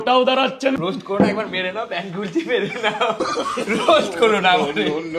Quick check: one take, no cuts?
no; 1 cut; at 1.0 s

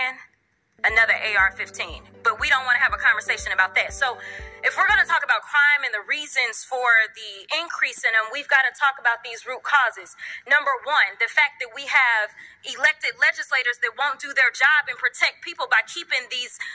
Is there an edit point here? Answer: no; 0 cuts

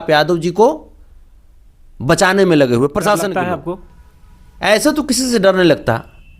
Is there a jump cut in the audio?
yes; 1 cut; at 3.4 s

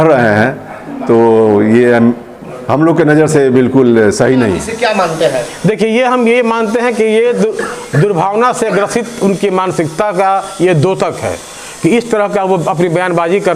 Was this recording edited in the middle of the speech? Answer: yes; 1 cut; at 4.7 s

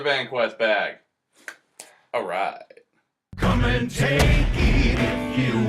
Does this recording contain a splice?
yes; 1 cut; at 1.9 s

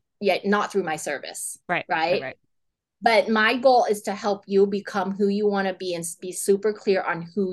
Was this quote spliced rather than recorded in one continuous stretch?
no; 0 cuts

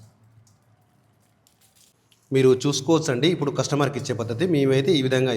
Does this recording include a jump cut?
yes; 1 cut; at 2.0 s

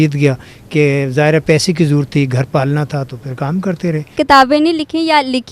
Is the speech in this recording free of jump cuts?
no; 1 cut; at 4.1 s

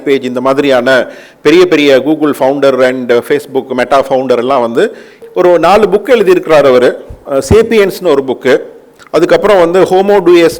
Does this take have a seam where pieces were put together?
yes; 1 cut; at 5.1 s

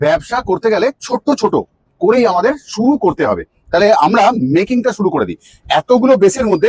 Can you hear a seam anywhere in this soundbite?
no; 0 cuts

